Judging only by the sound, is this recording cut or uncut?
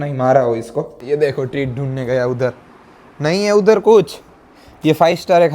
cut